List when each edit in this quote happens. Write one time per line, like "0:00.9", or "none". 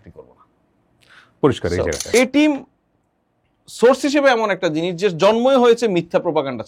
0:02.0

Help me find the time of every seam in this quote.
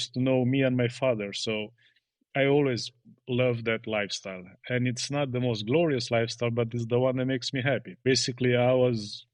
0:07.9

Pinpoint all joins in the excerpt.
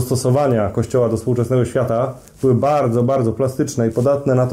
none

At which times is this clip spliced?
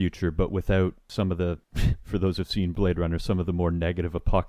0:01.3
0:02.7

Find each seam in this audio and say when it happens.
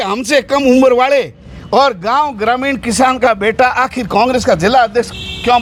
none

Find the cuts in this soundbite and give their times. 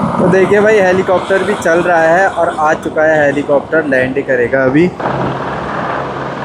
0:05.0

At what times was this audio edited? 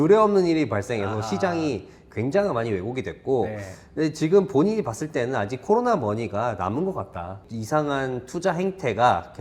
0:07.5

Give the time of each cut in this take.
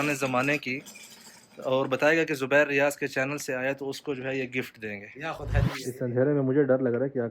0:05.7

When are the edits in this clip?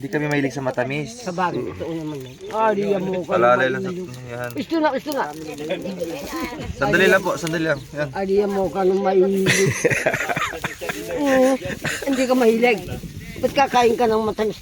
none

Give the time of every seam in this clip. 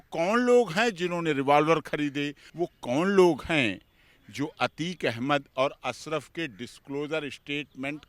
0:02.4

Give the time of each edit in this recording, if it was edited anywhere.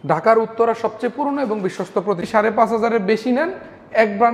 0:02.2

